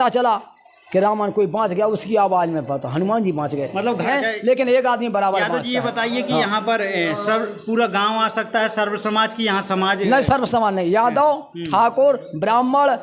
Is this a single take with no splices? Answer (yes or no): no